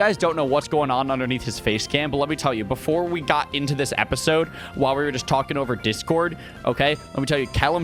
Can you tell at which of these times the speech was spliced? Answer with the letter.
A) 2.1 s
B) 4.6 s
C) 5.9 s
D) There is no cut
D